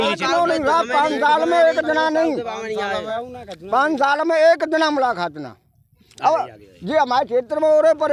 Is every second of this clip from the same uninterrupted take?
yes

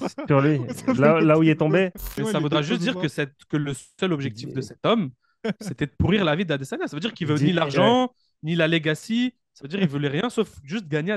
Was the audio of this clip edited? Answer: yes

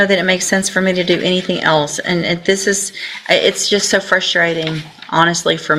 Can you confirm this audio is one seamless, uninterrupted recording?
yes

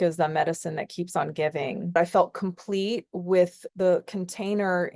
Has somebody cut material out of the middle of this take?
yes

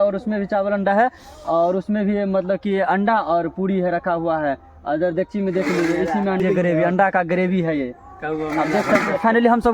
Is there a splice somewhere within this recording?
yes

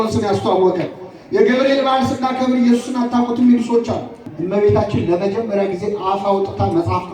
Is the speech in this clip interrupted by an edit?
yes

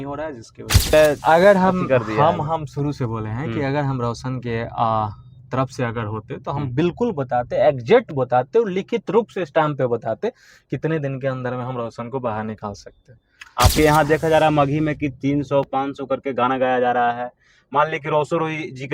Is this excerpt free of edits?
no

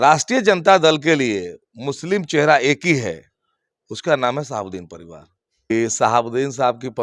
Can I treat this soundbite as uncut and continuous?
no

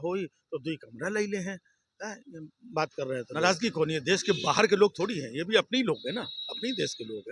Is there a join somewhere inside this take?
yes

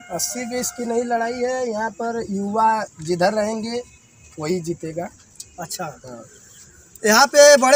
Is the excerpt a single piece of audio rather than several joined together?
yes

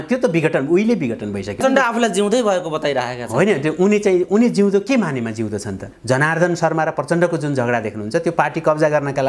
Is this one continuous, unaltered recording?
no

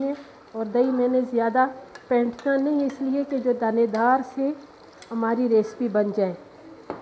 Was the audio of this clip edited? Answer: no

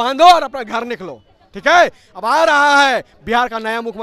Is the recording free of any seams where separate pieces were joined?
yes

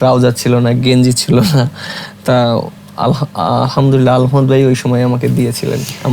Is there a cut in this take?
no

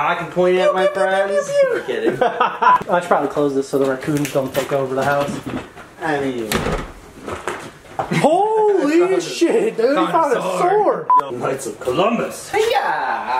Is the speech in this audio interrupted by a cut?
yes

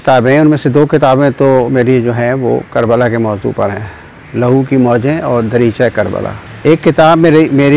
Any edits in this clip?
yes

